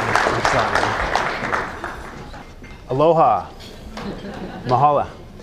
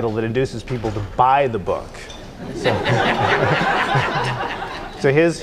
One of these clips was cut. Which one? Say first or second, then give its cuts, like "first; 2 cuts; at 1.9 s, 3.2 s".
second; 1 cut; at 1.0 s